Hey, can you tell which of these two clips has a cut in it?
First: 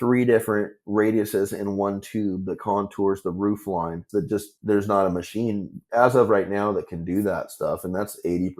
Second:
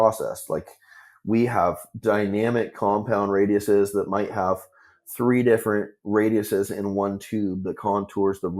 first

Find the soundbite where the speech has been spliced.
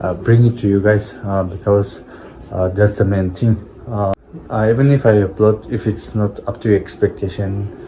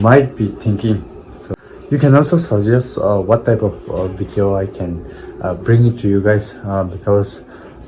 second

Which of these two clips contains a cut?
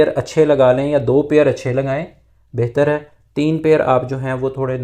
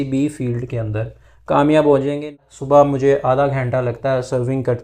second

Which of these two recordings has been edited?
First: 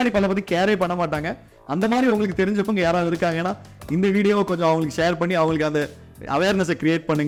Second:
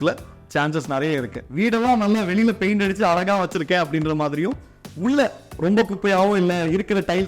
second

